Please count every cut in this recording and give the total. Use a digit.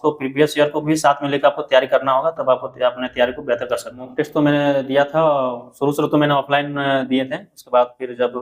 1